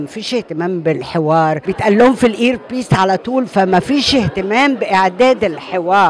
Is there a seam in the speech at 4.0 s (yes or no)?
no